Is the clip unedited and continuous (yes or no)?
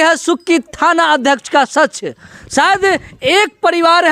yes